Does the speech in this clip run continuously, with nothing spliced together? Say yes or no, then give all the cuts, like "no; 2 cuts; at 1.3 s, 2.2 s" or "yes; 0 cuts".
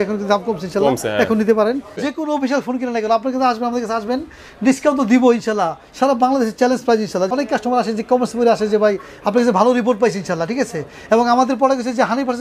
no; 2 cuts; at 2.0 s, 7.3 s